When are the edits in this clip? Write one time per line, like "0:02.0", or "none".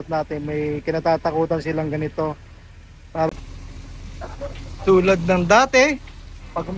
0:03.3